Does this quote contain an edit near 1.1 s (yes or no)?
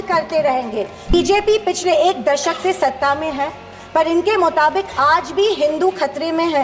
yes